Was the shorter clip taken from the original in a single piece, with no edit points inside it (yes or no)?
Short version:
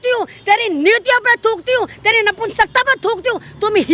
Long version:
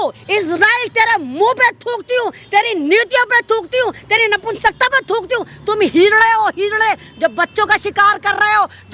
yes